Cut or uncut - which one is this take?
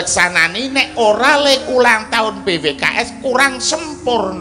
uncut